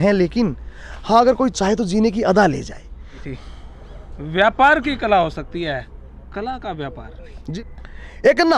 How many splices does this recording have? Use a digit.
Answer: 2